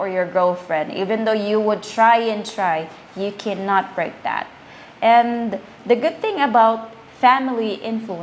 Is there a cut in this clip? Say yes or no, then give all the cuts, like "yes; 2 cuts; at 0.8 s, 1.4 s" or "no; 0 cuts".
no; 0 cuts